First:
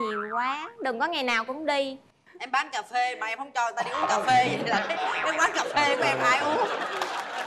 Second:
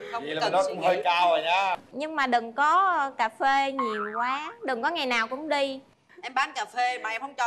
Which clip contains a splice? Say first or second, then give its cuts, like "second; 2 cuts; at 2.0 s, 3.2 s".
second; 1 cut; at 1.9 s